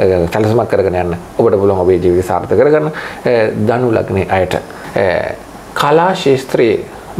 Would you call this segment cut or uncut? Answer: cut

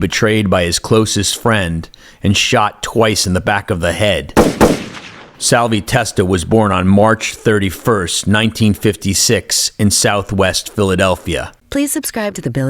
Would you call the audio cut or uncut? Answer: cut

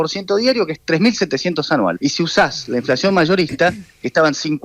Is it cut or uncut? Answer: cut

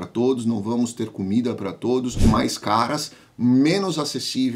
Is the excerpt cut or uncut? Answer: cut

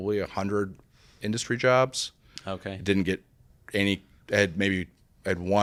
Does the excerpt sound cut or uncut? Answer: uncut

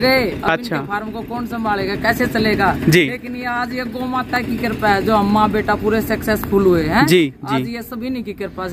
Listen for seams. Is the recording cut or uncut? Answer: uncut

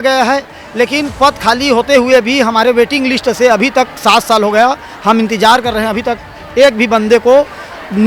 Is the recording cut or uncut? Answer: uncut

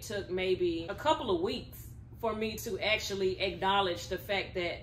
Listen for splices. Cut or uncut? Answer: cut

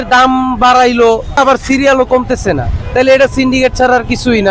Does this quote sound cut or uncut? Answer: cut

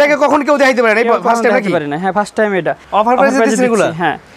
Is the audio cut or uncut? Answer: cut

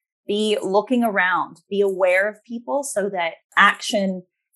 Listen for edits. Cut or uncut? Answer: uncut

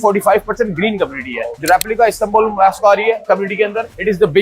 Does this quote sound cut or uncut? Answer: cut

